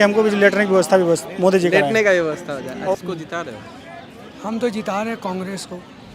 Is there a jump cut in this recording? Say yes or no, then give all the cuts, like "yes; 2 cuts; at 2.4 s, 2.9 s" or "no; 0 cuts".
yes; 1 cut; at 2.9 s